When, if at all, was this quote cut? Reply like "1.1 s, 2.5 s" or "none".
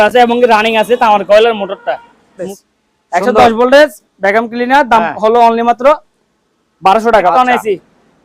2.5 s, 7.3 s